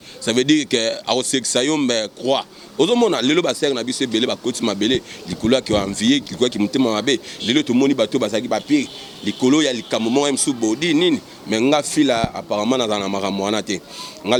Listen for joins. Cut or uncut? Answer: uncut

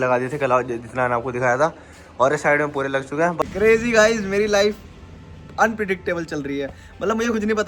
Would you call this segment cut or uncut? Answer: cut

